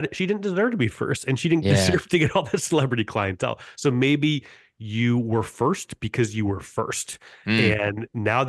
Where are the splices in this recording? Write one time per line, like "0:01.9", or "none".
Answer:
none